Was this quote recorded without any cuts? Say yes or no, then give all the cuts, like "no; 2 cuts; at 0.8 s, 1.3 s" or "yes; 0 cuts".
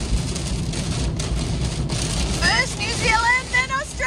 yes; 0 cuts